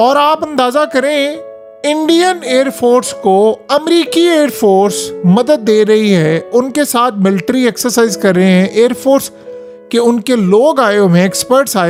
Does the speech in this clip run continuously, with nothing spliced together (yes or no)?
yes